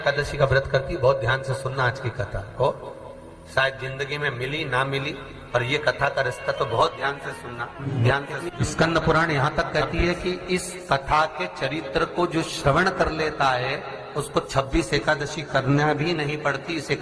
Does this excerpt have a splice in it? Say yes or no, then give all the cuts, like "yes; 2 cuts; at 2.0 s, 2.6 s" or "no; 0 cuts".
yes; 2 cuts; at 7.8 s, 8.5 s